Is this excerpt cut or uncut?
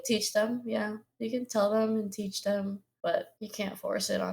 cut